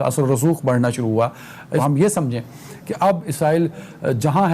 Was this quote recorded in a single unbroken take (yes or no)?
no